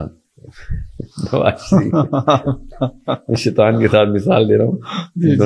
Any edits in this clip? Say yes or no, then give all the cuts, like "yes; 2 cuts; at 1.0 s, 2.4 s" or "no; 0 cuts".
no; 0 cuts